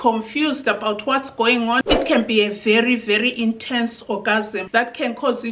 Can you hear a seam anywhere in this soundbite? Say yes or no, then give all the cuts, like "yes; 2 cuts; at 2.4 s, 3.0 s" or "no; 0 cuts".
yes; 1 cut; at 1.8 s